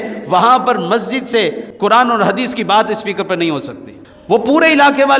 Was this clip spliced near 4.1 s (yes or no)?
yes